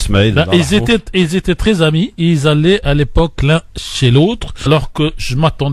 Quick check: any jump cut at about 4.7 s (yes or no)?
no